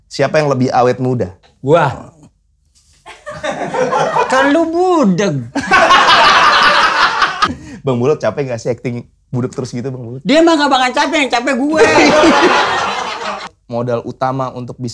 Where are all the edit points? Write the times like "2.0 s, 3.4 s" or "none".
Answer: 1.5 s, 4.3 s, 7.4 s, 13.6 s